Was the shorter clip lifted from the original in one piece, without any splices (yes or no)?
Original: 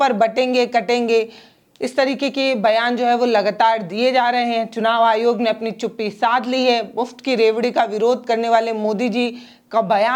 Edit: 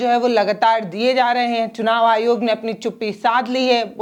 yes